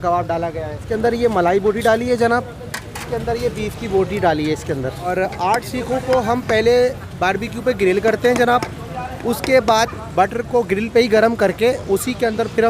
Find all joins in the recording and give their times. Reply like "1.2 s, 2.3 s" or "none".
0.8 s, 3.0 s, 5.1 s